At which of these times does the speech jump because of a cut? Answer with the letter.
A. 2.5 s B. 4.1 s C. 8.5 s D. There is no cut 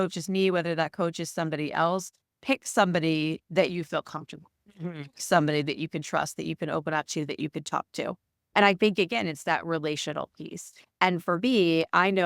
C